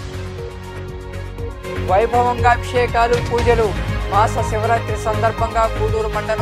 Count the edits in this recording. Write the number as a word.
one